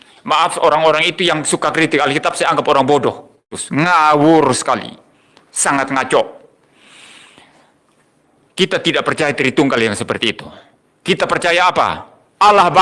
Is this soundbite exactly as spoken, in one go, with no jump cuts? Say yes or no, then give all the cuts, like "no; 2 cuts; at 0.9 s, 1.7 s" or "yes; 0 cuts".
no; 1 cut; at 3.5 s